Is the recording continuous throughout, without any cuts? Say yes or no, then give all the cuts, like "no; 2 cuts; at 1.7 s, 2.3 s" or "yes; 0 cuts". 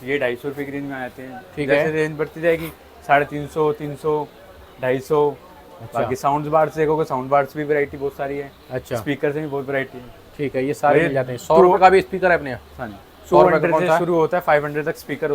yes; 0 cuts